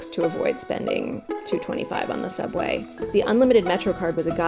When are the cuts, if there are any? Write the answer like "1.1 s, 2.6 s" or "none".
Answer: 2.9 s